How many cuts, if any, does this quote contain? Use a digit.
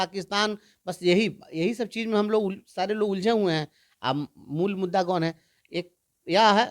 0